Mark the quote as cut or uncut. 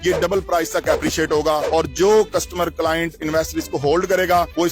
uncut